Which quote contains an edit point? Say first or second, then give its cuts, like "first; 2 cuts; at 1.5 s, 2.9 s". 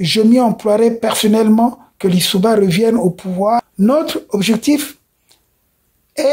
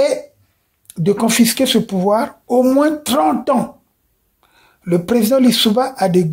first; 1 cut; at 3.7 s